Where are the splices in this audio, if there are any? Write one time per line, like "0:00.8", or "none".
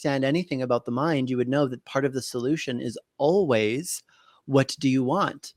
none